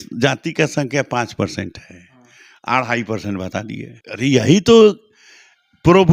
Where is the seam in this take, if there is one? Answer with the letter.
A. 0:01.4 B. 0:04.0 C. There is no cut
B